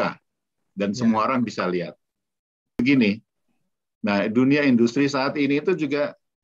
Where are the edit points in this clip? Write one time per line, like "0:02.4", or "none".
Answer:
0:02.8